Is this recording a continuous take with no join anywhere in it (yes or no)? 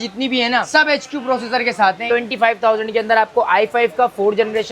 no